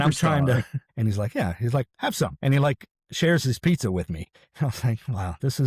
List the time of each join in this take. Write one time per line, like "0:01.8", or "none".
0:00.9
0:02.4
0:04.4